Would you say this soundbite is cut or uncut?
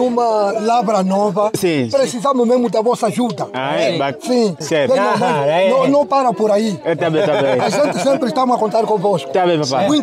uncut